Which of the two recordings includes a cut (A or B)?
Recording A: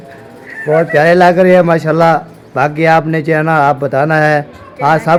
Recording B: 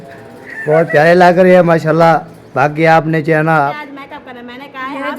B